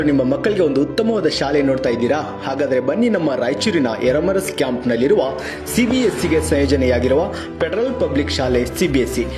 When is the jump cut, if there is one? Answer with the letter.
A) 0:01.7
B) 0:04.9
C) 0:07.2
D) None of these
D